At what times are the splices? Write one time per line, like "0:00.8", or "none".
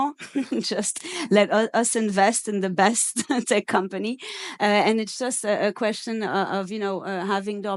none